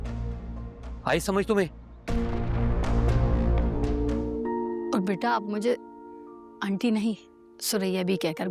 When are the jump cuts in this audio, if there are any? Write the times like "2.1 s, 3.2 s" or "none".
3.8 s